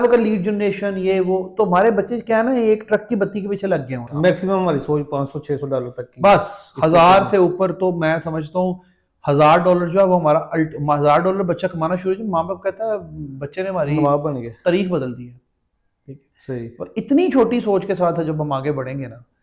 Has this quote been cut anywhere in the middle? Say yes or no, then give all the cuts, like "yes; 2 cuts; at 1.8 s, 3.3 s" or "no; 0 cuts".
yes; 1 cut; at 4.0 s